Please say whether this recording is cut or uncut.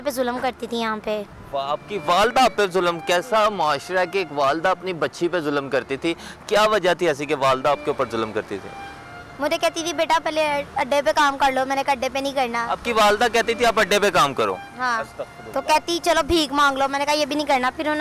uncut